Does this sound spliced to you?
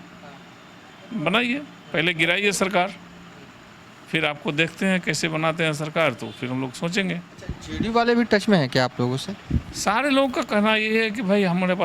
yes; 1 cut; at 7.3 s

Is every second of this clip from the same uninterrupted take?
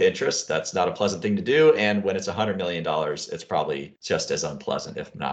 yes; 0 cuts

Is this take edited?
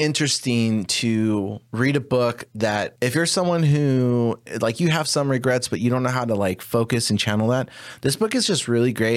yes; 3 cuts; at 1.6 s, 2.9 s, 4.5 s

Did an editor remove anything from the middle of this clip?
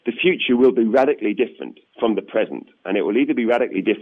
no; 0 cuts

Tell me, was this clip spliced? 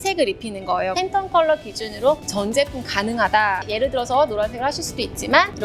yes; 1 cut; at 0.9 s

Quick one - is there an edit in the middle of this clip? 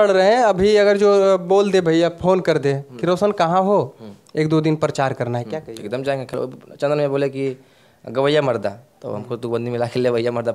yes; 1 cut; at 6.4 s

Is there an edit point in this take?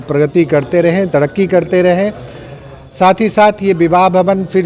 no; 0 cuts

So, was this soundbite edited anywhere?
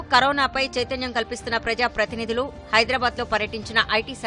no; 0 cuts

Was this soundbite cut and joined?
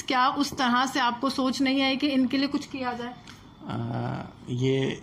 no; 0 cuts

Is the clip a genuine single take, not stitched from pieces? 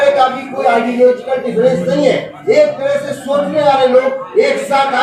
yes; 0 cuts

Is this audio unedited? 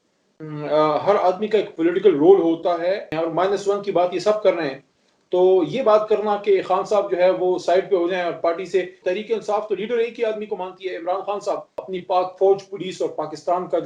no; 3 cuts; at 3.1 s, 9.0 s, 11.7 s

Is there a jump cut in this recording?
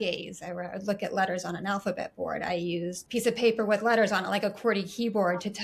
yes; 1 cut; at 3.0 s

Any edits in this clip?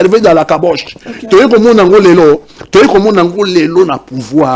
no; 0 cuts

